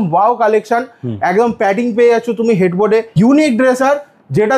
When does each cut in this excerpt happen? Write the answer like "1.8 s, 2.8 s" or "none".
3.1 s